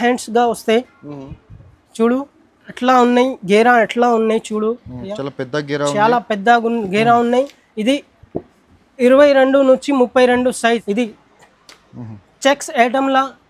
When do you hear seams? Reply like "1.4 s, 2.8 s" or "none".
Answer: 10.8 s